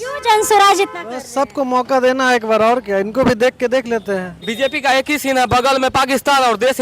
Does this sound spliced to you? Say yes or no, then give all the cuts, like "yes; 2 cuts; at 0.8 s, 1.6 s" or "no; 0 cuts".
yes; 1 cut; at 4.4 s